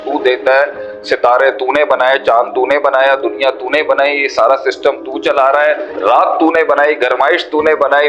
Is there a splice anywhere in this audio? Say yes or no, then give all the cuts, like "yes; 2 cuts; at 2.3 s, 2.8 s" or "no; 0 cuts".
yes; 1 cut; at 5.9 s